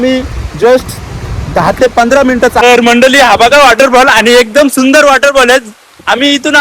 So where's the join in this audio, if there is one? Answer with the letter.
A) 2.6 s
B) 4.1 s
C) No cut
A